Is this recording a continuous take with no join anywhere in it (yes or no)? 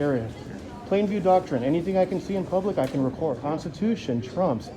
no